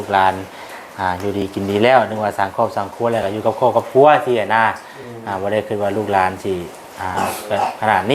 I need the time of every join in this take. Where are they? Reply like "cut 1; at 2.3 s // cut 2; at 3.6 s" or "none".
cut 1; at 7.1 s